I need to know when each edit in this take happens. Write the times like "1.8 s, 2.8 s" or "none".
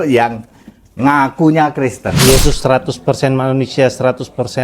2.2 s